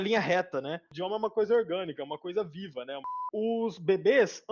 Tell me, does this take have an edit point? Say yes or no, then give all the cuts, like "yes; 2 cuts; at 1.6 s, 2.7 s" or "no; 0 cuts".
yes; 2 cuts; at 1.0 s, 3.3 s